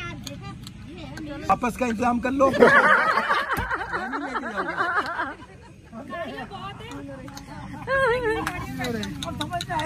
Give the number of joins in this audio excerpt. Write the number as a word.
one